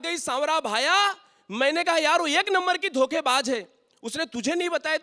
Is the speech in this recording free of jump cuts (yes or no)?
yes